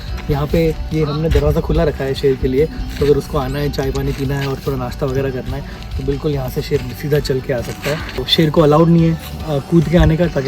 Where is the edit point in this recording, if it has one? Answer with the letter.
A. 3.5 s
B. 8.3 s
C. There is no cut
B